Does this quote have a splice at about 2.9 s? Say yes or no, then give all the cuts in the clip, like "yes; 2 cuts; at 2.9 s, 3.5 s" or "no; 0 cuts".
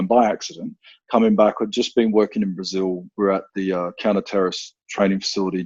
no; 0 cuts